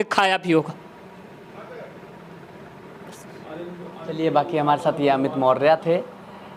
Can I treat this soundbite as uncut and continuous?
yes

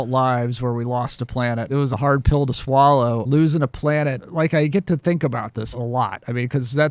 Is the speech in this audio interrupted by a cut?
yes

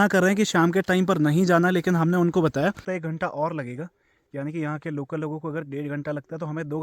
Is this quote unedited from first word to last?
no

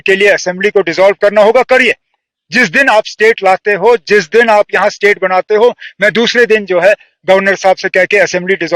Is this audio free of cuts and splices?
yes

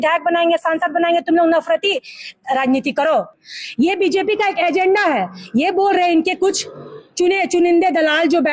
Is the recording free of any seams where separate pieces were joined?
no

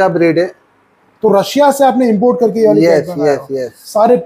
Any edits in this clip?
no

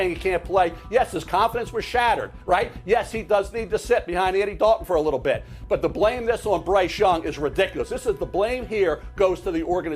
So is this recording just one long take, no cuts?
yes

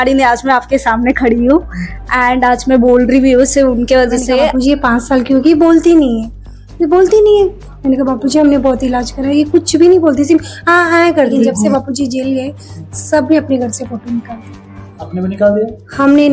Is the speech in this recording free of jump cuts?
no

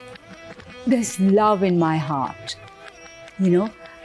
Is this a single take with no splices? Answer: yes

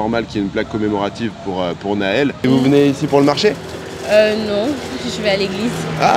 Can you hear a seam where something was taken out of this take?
yes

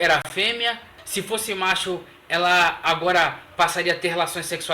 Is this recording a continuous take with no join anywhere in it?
no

